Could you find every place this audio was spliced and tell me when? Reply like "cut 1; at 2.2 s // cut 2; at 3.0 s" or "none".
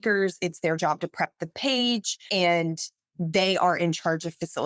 cut 1; at 2.2 s